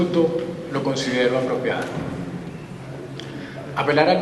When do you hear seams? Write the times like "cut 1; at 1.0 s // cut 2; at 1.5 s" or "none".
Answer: cut 1; at 2.5 s